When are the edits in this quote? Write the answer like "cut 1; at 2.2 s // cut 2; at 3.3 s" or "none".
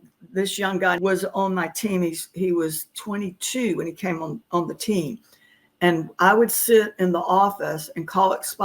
cut 1; at 1.0 s